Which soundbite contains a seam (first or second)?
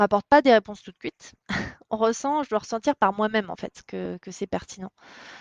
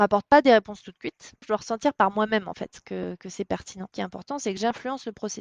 second